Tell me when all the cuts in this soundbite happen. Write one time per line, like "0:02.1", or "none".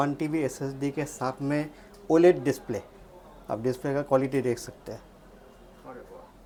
none